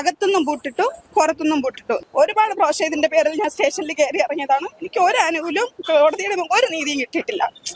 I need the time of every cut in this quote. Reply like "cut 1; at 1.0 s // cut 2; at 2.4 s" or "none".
cut 1; at 2.0 s